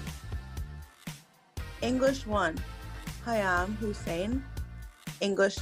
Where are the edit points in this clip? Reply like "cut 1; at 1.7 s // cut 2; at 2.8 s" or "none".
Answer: cut 1; at 1.8 s